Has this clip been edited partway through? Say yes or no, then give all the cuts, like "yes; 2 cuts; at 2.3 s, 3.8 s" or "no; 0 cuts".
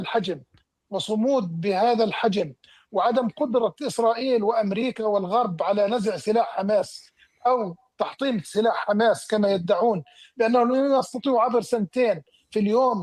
no; 0 cuts